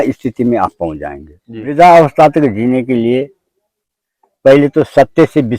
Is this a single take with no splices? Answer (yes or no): no